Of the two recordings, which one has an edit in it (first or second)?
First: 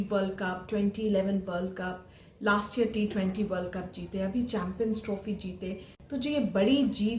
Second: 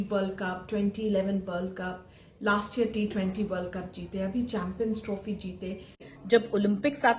second